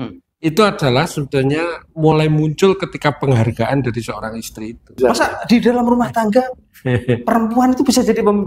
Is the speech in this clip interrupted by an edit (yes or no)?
yes